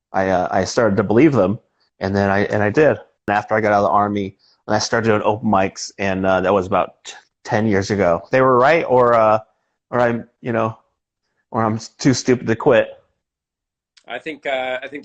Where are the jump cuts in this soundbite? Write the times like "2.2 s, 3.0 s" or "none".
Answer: 3.3 s, 8.3 s